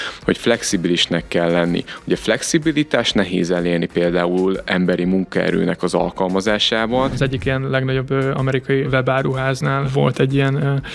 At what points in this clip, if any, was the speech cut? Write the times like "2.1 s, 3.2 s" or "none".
7.2 s, 8.9 s, 9.9 s